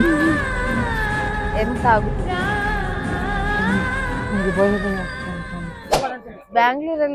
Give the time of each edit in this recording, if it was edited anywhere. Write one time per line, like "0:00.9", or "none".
0:05.9

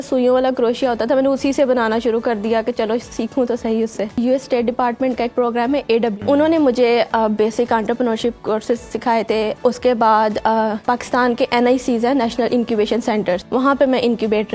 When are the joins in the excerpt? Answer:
0:04.2
0:06.2
0:09.6
0:10.8
0:13.4

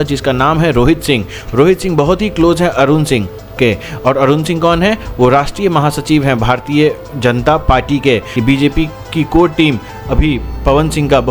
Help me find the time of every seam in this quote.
0:08.3

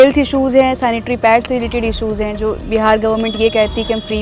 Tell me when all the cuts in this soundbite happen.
none

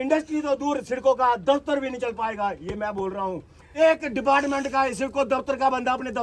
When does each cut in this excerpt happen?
0:03.6

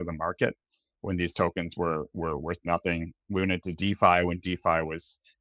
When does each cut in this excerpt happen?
none

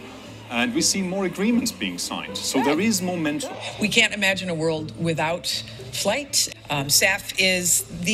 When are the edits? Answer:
0:03.5
0:06.7

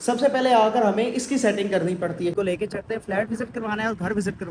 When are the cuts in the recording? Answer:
0:02.3

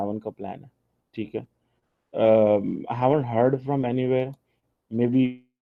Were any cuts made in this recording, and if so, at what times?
none

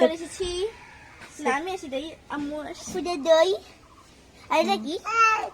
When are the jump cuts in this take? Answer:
0:02.9

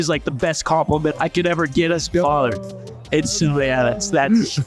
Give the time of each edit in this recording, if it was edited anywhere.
0:01.1

